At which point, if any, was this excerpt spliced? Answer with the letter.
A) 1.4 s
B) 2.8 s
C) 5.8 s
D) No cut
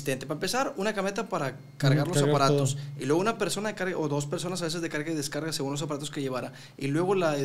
D